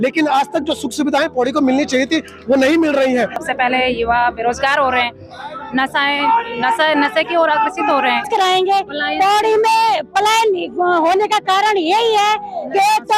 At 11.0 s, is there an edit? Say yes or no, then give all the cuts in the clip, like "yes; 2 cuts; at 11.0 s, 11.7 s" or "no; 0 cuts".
no; 2 cuts; at 3.4 s, 8.3 s